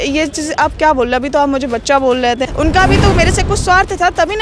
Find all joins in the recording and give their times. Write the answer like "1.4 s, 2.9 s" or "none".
2.4 s